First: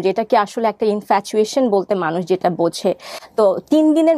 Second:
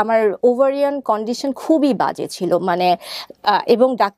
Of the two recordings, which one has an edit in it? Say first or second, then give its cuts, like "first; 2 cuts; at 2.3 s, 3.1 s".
first; 1 cut; at 3.1 s